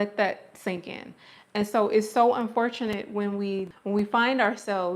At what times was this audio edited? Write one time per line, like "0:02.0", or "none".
0:03.7